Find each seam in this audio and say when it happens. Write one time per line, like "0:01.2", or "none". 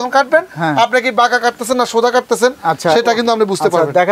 none

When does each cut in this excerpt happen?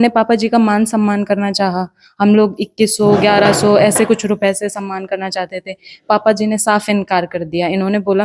none

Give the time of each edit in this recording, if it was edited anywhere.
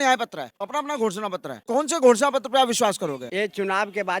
0:03.2

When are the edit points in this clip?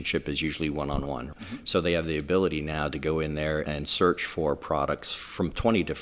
0:01.3
0:03.6

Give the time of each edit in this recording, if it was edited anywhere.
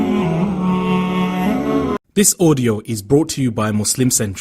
0:02.0

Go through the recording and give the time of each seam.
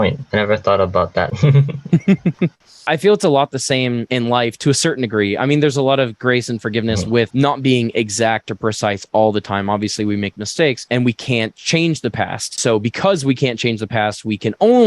0:01.3
0:02.8

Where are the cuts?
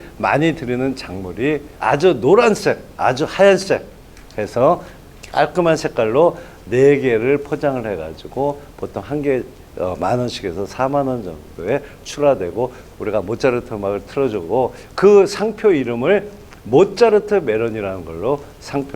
0:01.7
0:12.9

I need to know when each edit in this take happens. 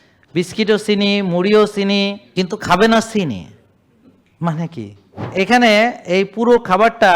0:02.2
0:05.3

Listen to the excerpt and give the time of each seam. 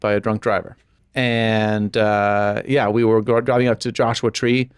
0:01.0

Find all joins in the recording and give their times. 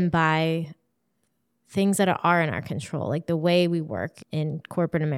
0:04.2

